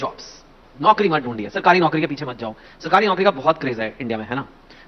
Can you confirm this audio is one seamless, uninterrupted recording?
yes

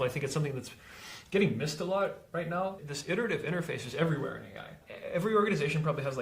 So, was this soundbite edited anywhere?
yes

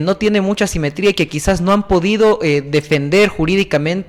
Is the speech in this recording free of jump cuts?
yes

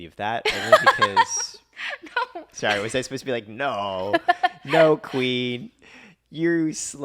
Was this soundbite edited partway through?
yes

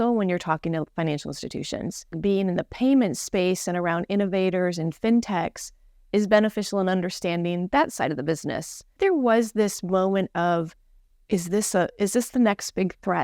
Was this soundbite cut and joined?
yes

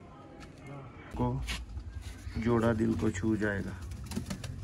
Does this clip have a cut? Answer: yes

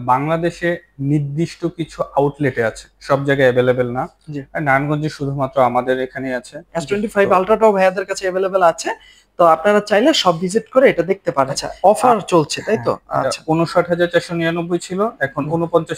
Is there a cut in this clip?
yes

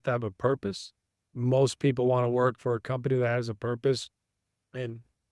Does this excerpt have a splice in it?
yes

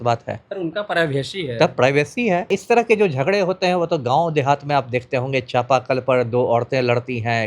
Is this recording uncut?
no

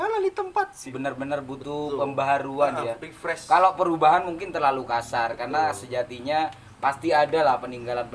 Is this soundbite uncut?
no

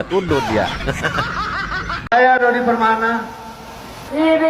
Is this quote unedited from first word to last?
no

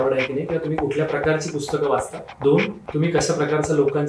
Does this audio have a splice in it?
yes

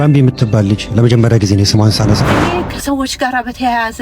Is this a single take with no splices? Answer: no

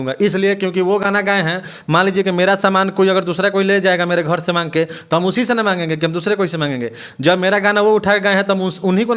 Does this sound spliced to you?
no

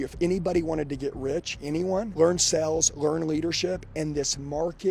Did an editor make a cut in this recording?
no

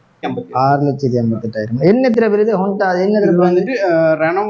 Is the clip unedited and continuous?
yes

